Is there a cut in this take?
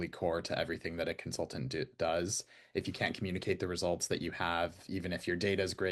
no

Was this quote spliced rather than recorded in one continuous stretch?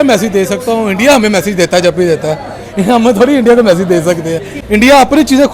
yes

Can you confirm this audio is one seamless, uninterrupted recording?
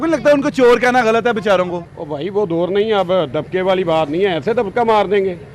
no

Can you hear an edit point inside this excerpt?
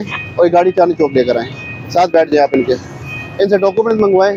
no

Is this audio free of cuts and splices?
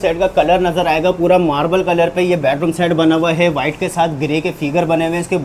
yes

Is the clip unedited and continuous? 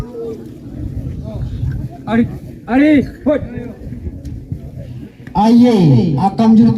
no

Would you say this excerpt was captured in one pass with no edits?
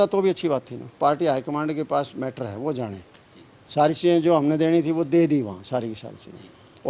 no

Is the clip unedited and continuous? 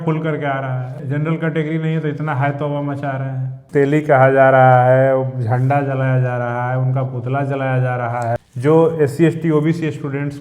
no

